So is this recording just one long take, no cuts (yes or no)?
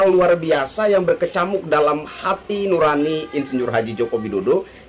yes